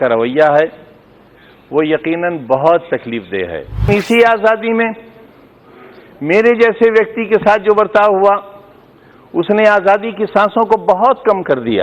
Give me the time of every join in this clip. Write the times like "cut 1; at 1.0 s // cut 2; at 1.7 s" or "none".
cut 1; at 3.9 s

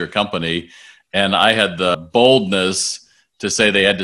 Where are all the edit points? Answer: cut 1; at 2.0 s

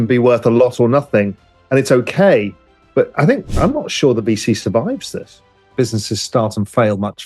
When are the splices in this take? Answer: cut 1; at 5.6 s

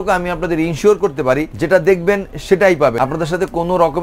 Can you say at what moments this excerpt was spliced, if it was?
cut 1; at 1.5 s // cut 2; at 3.0 s

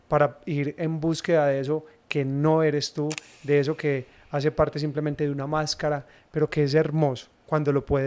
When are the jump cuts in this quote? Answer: none

